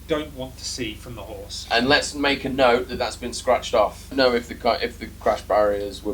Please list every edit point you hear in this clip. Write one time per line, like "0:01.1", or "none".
0:01.6
0:04.1